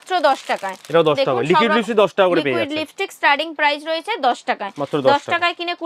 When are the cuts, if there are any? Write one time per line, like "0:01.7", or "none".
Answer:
none